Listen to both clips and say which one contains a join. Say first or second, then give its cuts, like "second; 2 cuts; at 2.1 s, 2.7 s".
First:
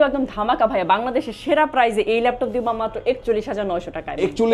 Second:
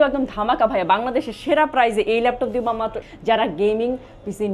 second; 1 cut; at 3.0 s